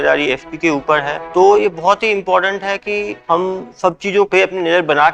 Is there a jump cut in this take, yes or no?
yes